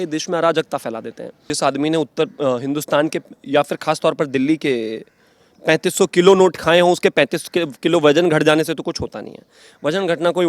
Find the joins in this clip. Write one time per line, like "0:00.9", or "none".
0:01.5

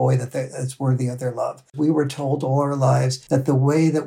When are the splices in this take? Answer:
0:01.7
0:03.2

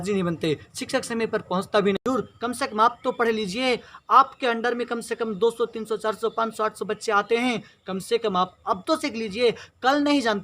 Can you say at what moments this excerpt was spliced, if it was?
0:02.0

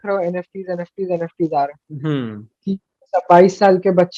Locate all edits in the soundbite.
none

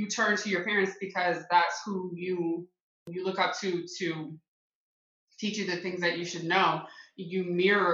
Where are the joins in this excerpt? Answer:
0:03.1

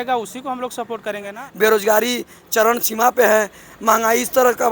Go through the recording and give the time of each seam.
0:01.4

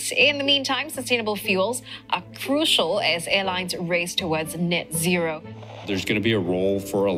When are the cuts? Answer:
0:05.8

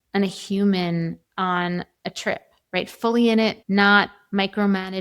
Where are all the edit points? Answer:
0:01.2
0:03.6

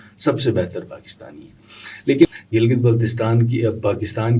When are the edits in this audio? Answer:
0:02.3

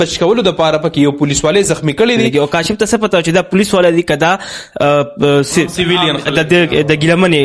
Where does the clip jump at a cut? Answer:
0:02.3

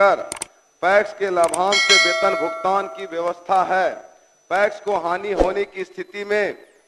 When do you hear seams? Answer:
none

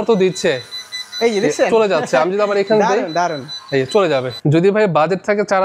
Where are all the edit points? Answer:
0:04.3

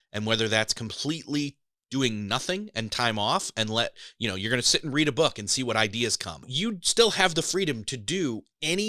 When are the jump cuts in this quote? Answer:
0:06.5

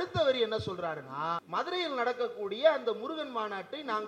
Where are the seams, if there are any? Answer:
0:01.4

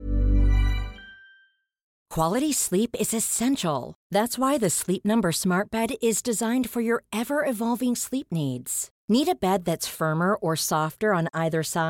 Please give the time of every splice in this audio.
0:02.0

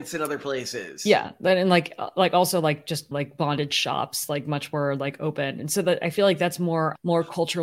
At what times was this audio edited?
none

